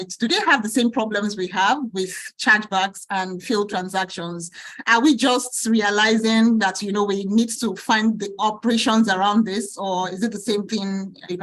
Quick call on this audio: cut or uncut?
uncut